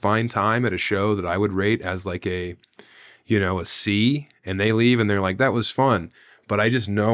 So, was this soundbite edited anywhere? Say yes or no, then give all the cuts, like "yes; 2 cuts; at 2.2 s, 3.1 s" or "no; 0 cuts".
no; 0 cuts